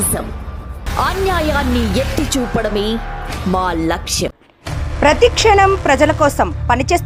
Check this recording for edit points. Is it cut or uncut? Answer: uncut